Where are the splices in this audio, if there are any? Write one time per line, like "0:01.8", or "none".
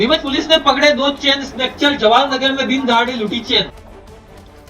0:03.7